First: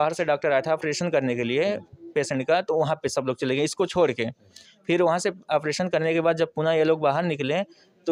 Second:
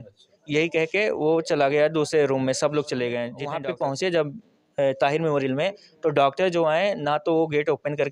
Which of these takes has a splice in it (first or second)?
second